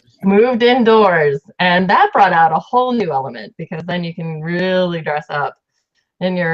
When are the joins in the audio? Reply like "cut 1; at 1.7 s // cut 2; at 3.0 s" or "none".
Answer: cut 1; at 2.4 s